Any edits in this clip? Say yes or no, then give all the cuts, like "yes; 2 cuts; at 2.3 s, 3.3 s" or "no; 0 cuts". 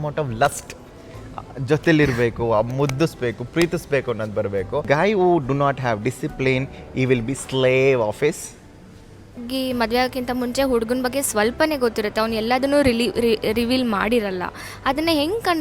yes; 2 cuts; at 4.8 s, 9.4 s